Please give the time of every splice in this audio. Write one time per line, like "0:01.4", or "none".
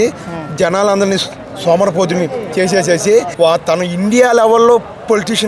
0:03.3